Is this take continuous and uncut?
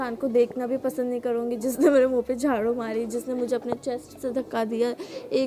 yes; 0 cuts

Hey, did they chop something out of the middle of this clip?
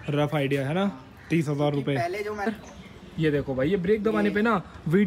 yes; 1 cut; at 2.5 s

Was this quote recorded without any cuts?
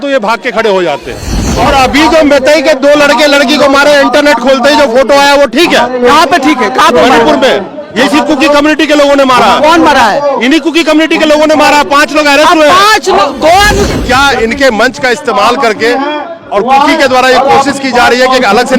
no; 2 cuts; at 1.4 s, 13.9 s

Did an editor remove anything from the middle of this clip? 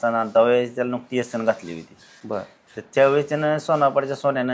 no; 0 cuts

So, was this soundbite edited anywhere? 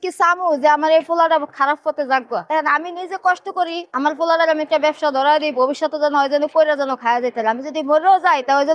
no; 0 cuts

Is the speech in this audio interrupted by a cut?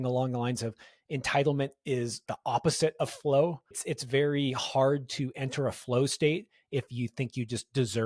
yes; 2 cuts; at 2.2 s, 3.7 s

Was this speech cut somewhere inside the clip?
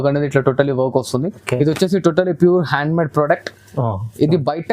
yes; 1 cut; at 1.4 s

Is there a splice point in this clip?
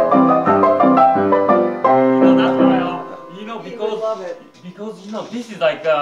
no; 0 cuts

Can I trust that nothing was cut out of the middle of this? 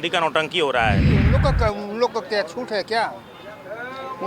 no; 1 cut; at 1.1 s

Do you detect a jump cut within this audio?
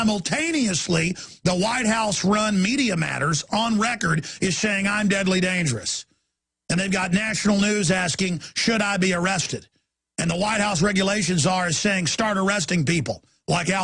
yes; 1 cut; at 12.3 s

